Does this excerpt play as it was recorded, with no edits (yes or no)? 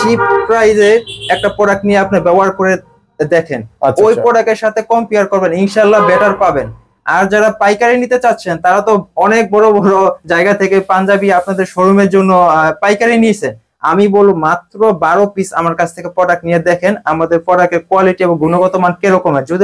yes